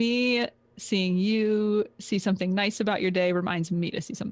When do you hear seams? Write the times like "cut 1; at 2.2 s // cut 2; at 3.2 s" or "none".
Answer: none